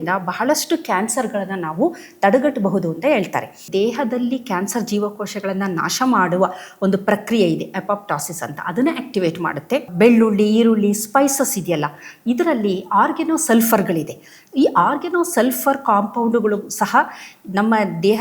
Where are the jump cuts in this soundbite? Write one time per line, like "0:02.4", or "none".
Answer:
0:03.6
0:09.9